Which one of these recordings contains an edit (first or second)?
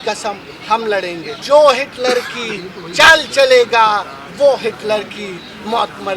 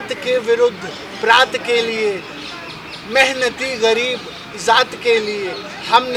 first